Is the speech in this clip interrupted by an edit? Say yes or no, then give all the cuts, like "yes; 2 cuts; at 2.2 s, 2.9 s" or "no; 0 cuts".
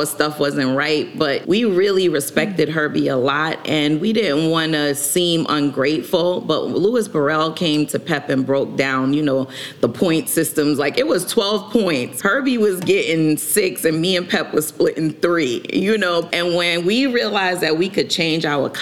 yes; 3 cuts; at 1.4 s, 12.1 s, 16.3 s